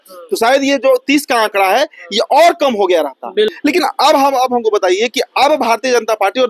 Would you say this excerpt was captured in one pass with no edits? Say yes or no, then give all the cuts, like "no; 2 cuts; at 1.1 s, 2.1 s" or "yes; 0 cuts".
no; 1 cut; at 3.5 s